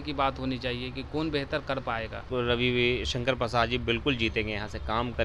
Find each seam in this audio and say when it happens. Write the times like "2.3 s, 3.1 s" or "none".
2.3 s